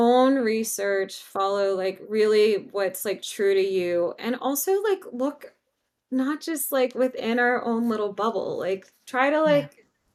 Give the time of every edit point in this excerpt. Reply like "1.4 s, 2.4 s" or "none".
none